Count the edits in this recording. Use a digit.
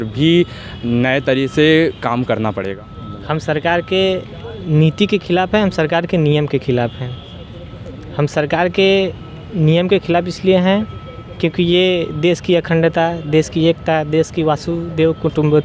1